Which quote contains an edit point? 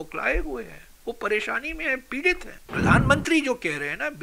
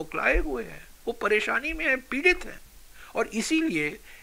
first; 1 cut; at 2.7 s

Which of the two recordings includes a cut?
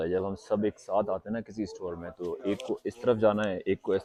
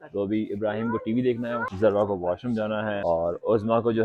second; 2 cuts; at 1.7 s, 3.0 s

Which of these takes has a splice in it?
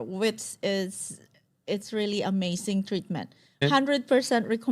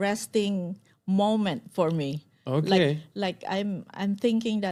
first; 1 cut; at 3.6 s

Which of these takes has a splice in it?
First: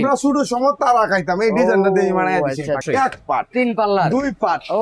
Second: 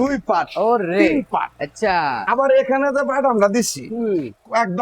first; 1 cut; at 2.8 s

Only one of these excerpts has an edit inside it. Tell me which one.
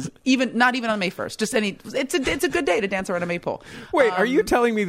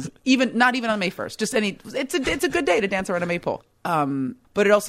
second; 1 cut; at 3.9 s

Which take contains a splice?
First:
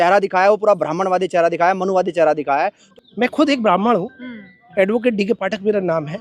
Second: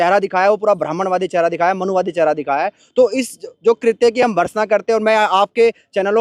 first; 1 cut; at 2.8 s

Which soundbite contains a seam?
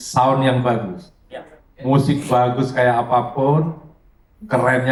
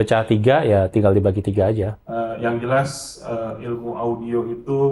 second; 1 cut; at 1.9 s

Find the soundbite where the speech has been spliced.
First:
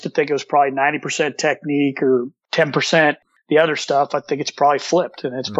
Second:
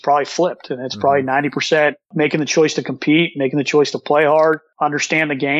second; 2 cuts; at 2.1 s, 4.7 s

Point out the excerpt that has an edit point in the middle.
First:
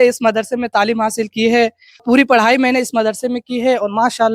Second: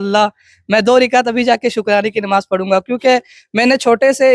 first; 1 cut; at 2.0 s

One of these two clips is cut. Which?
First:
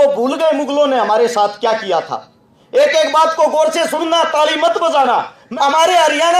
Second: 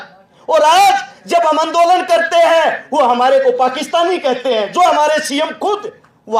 first; 1 cut; at 5.5 s

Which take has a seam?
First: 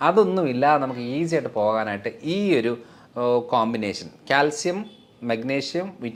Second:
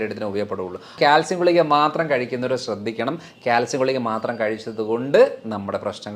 second; 1 cut; at 1.0 s

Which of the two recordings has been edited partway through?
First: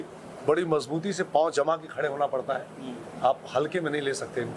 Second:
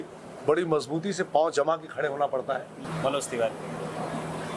second; 1 cut; at 2.8 s

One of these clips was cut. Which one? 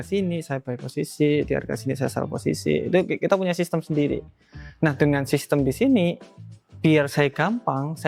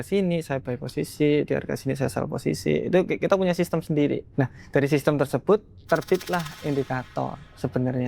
second; 1 cut; at 4.3 s

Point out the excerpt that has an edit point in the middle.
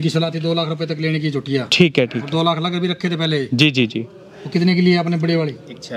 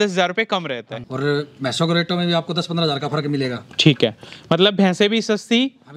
second; 1 cut; at 1.0 s

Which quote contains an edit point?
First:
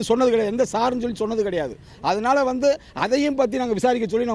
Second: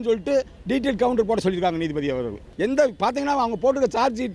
second; 1 cut; at 2.5 s

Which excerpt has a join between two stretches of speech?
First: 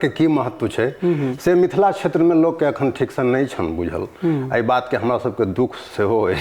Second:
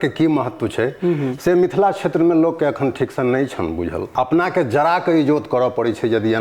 second; 1 cut; at 4.1 s

